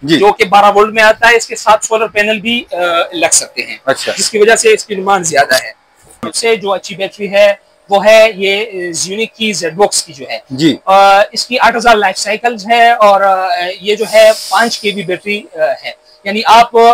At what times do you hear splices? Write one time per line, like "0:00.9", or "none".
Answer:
0:06.1